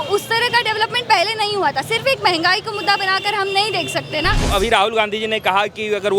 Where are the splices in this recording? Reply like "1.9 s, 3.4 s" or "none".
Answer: 4.5 s